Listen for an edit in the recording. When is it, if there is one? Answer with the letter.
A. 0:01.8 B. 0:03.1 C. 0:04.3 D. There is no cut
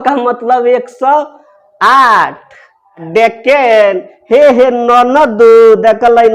B